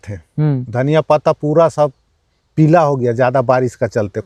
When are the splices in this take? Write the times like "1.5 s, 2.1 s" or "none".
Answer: none

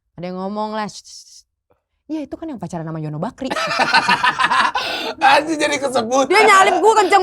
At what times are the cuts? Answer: 6.3 s

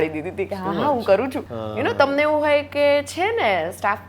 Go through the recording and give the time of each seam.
1.4 s

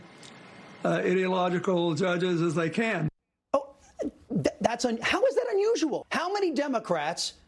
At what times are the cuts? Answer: 3.3 s, 6.1 s

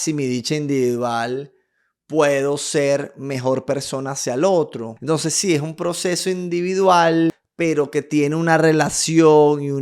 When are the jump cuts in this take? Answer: 4.9 s, 7.5 s

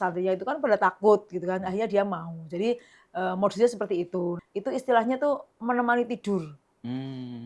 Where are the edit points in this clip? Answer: 4.4 s

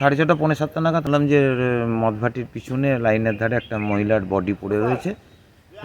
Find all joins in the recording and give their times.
1.0 s

